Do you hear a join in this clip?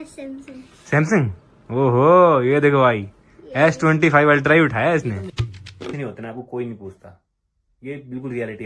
yes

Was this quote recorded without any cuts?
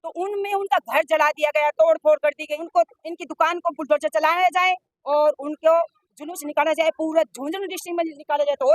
no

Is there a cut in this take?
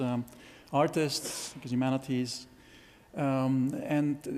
no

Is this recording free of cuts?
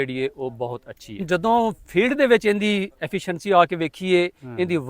no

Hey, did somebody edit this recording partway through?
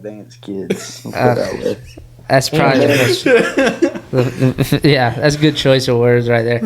no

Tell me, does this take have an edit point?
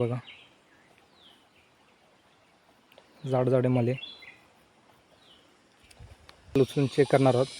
yes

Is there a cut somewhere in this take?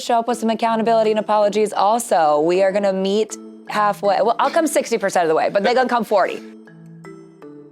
yes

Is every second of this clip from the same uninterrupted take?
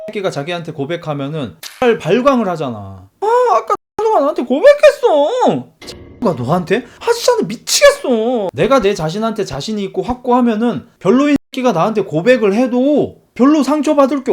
no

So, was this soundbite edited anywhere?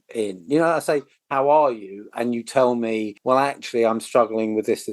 no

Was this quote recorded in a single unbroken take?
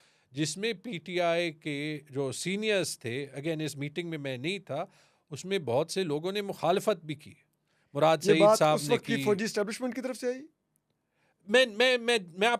yes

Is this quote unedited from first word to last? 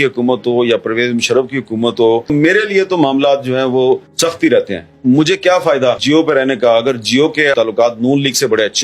no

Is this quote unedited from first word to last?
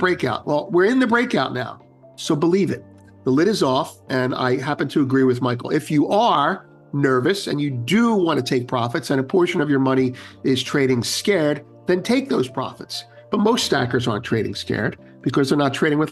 yes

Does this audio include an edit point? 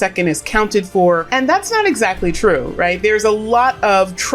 yes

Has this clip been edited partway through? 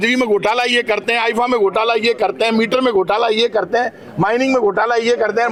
no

